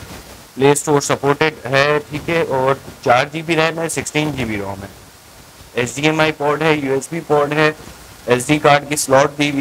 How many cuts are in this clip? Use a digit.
0